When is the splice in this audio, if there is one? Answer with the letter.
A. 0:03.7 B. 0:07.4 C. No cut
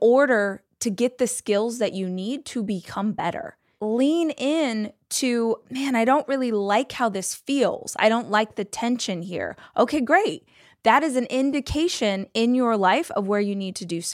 A